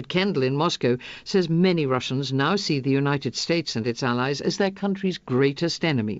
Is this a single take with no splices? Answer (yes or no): yes